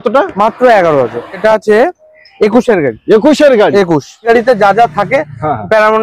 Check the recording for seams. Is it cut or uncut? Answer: cut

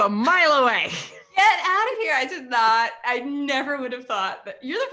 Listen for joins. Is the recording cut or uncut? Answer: uncut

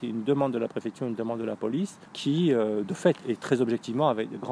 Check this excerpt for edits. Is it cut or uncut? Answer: cut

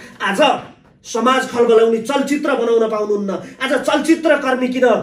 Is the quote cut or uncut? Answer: uncut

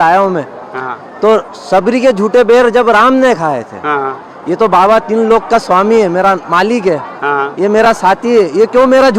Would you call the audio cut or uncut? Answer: uncut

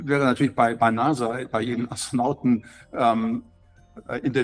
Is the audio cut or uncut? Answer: uncut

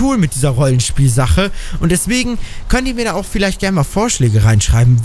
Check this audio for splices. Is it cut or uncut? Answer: uncut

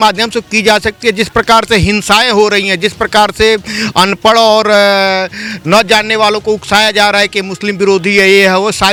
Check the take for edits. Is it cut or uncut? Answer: uncut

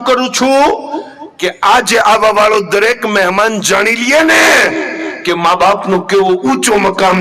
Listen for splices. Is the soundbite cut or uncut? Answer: uncut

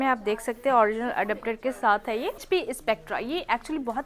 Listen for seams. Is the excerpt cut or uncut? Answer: cut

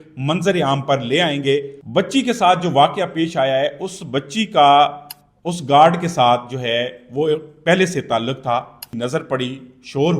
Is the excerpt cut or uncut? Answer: cut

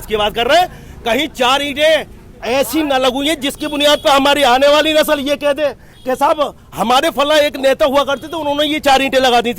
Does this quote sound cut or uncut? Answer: uncut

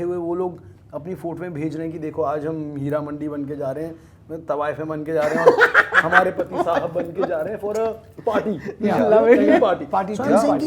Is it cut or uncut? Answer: uncut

